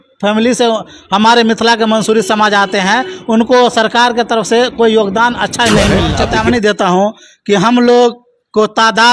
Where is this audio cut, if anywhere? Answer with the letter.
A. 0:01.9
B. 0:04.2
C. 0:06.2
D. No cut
C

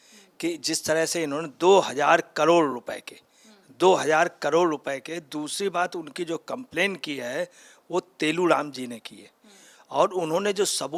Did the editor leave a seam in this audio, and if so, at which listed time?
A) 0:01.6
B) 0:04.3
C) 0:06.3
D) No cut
D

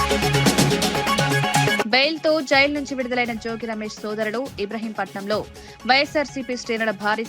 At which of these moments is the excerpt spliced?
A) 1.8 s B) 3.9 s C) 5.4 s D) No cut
A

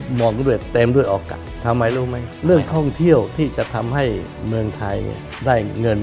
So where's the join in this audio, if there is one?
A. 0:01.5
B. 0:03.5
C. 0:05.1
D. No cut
A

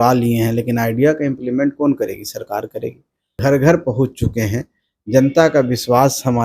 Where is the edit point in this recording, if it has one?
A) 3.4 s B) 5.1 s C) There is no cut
A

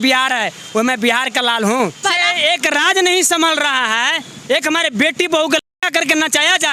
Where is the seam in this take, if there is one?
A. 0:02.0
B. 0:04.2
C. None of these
A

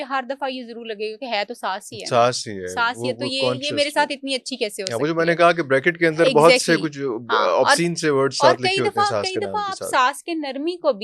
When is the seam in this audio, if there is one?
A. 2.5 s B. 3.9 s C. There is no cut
C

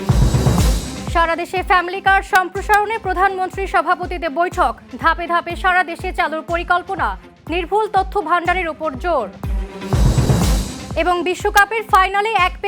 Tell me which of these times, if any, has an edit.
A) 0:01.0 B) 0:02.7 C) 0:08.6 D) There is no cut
A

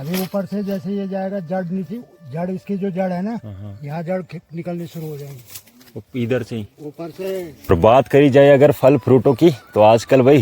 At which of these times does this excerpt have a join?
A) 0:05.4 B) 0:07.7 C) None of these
B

